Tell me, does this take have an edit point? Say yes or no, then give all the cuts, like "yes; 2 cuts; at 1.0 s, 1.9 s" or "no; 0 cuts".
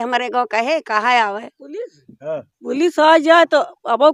no; 0 cuts